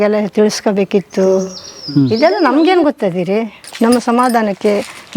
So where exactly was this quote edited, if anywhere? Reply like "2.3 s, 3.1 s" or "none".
3.6 s